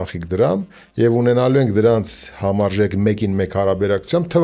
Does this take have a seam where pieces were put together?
no; 0 cuts

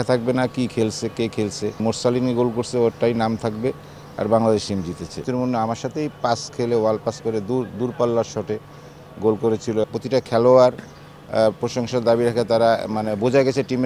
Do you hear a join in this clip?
yes; 3 cuts; at 1.8 s, 5.3 s, 9.8 s

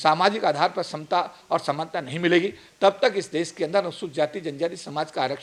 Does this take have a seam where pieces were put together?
no; 0 cuts

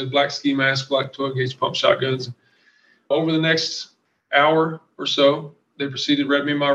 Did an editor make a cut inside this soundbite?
yes; 1 cut; at 3.1 s

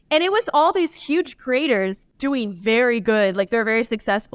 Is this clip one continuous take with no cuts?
no; 1 cut; at 2.0 s

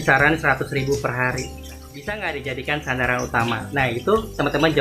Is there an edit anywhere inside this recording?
yes; 1 cut; at 1.9 s

